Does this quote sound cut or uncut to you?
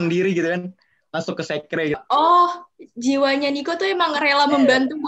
cut